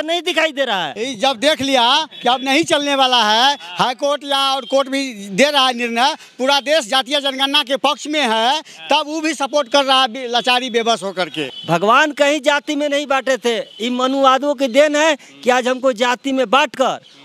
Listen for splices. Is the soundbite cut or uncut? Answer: cut